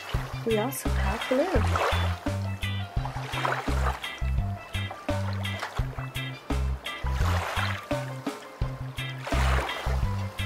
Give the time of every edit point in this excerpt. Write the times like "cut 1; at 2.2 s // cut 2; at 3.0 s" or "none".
none